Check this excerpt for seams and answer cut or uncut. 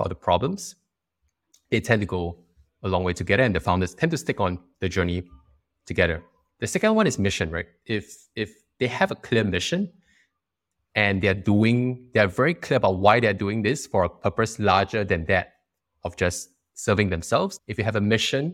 cut